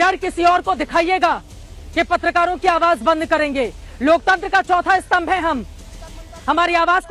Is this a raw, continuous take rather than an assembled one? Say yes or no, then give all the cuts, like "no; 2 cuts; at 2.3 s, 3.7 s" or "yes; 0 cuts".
yes; 0 cuts